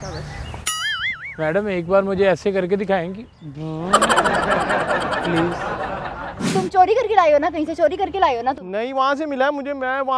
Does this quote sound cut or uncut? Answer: cut